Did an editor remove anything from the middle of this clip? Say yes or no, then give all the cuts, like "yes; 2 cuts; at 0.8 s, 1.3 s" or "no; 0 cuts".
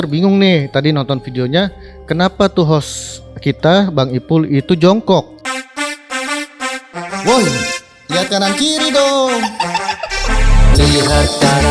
yes; 1 cut; at 5.3 s